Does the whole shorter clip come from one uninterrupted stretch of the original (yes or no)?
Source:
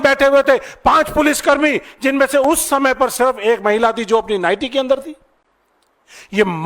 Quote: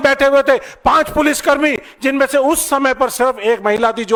yes